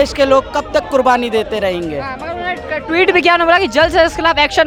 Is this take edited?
no; 0 cuts

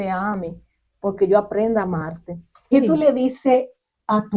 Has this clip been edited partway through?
yes; 1 cut; at 2.5 s

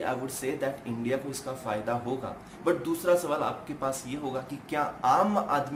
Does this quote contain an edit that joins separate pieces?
no; 0 cuts

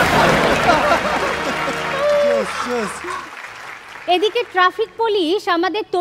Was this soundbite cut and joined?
yes; 1 cut; at 3.3 s

